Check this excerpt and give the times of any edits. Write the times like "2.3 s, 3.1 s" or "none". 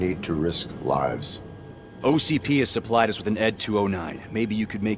3.6 s